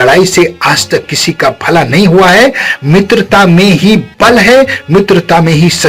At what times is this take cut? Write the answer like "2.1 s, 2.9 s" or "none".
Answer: none